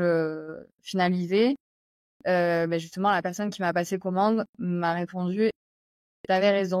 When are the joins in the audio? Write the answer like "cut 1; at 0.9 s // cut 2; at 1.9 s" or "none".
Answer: none